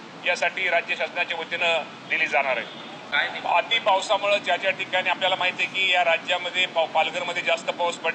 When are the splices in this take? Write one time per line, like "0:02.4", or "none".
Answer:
0:03.1